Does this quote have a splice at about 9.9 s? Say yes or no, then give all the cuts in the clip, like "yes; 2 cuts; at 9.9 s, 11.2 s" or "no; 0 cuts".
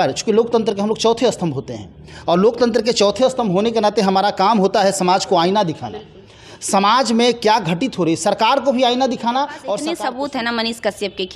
yes; 1 cut; at 9.9 s